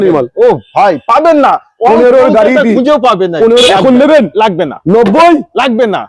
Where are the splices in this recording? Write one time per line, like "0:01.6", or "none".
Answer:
0:03.7